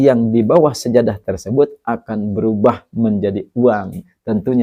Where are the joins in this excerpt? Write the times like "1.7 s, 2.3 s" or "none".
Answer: none

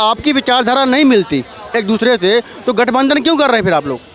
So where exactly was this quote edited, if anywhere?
none

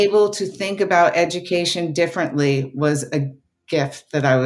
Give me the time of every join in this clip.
none

